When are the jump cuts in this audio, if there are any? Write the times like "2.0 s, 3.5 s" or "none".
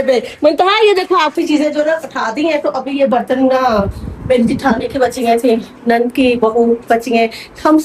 1.3 s